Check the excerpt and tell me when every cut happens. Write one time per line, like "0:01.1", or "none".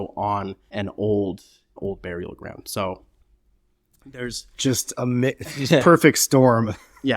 0:01.8

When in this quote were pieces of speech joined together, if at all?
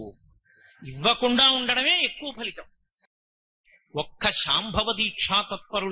0:03.4

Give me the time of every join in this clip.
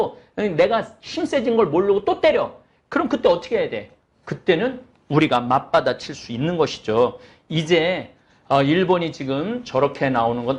none

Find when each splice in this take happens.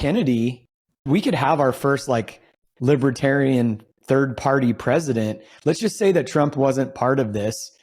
0:01.1

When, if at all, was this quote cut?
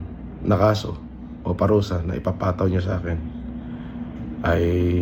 none

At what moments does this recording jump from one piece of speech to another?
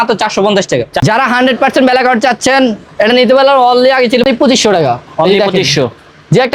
0:00.9
0:04.2

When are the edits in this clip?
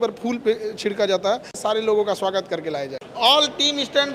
0:01.6
0:03.0

